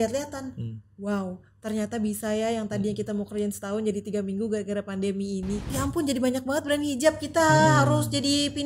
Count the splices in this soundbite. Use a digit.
1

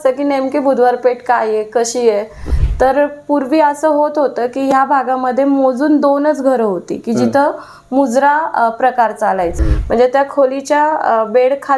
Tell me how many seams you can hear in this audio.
2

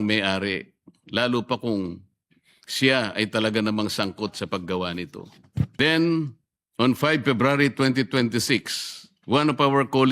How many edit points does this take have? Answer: 1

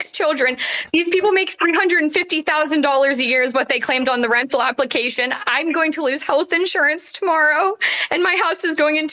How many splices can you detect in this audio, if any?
0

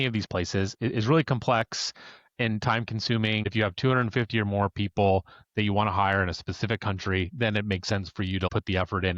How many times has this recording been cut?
2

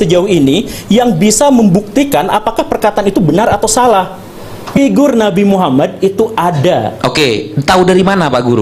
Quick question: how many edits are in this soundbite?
1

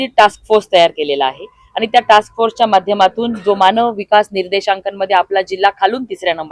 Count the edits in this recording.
0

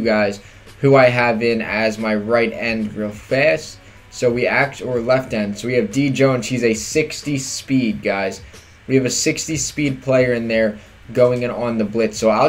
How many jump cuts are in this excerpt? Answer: 1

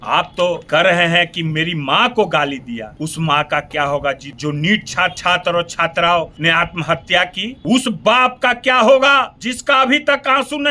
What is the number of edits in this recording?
0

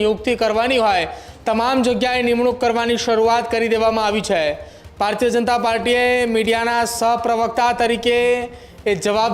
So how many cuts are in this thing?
0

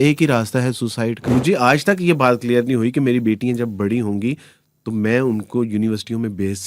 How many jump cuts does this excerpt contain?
1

